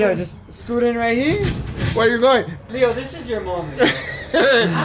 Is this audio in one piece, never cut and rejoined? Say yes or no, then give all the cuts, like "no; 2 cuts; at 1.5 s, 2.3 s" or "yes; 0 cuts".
no; 1 cut; at 2.6 s